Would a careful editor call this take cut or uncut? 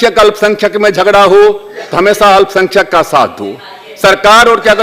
uncut